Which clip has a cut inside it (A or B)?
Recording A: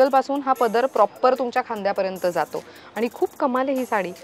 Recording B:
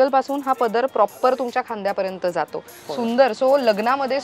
B